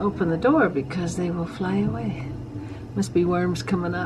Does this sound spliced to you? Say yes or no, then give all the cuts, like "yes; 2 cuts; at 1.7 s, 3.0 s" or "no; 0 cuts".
no; 0 cuts